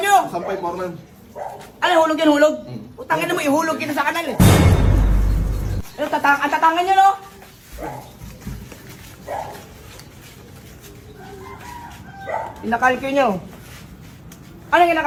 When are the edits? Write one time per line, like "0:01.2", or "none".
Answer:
none